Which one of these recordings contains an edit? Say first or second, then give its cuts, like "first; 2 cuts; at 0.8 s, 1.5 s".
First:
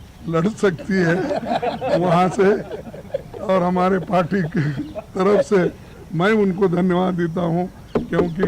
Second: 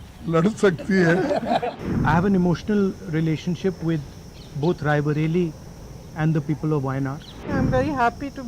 second; 2 cuts; at 1.7 s, 7.5 s